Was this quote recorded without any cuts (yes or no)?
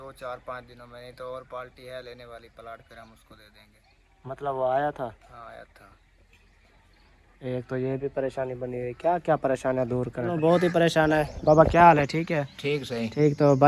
no